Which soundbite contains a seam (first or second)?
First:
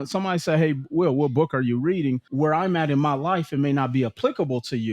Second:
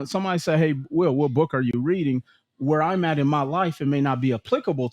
first